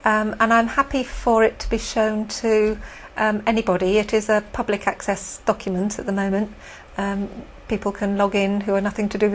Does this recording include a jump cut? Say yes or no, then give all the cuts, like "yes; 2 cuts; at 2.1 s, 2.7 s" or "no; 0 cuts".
yes; 1 cut; at 3.3 s